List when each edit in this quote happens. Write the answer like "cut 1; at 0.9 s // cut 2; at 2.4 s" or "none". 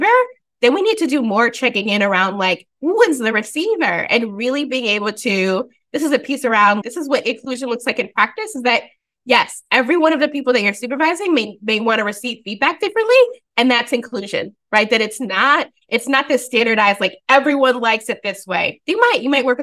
cut 1; at 6.8 s